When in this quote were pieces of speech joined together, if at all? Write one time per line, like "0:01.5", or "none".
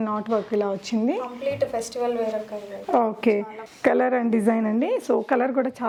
none